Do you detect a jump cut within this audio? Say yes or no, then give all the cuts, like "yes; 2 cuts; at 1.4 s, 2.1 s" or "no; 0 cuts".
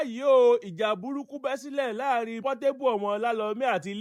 no; 0 cuts